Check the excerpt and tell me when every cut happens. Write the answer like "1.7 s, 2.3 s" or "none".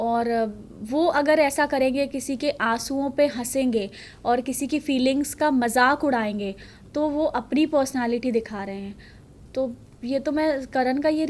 none